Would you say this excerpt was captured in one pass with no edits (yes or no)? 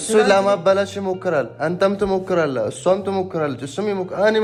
yes